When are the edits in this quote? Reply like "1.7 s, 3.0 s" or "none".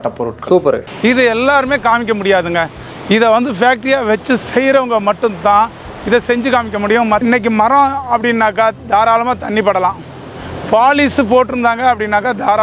0.9 s, 7.2 s